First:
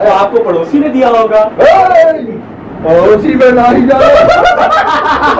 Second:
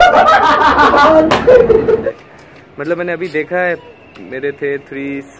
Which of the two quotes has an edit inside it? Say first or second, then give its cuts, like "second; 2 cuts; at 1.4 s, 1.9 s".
second; 1 cut; at 2.0 s